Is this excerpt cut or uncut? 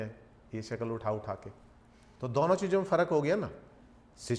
uncut